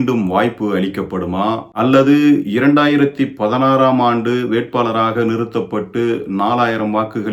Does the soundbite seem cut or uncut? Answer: cut